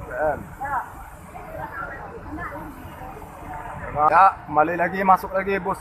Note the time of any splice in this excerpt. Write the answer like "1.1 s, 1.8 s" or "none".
4.1 s